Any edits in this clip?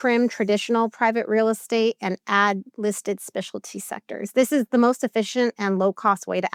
no; 0 cuts

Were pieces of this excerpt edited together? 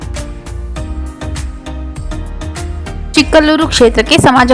yes; 1 cut; at 3.1 s

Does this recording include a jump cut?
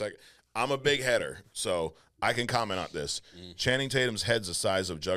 no; 0 cuts

